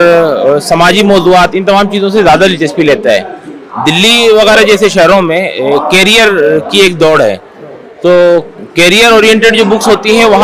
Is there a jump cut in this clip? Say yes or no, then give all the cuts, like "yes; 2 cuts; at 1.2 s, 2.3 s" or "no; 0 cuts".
no; 0 cuts